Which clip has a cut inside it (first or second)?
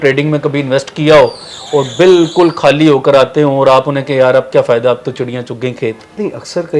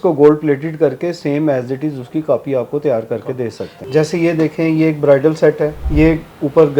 second